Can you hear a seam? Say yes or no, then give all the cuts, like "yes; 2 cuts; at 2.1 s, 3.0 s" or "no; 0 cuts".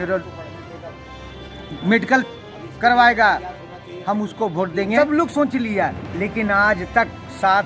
yes; 1 cut; at 5.0 s